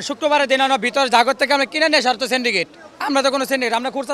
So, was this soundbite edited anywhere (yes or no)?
no